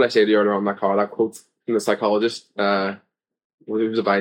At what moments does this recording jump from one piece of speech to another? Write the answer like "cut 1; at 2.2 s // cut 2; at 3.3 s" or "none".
none